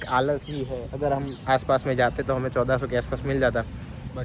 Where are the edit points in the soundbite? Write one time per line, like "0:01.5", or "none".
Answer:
none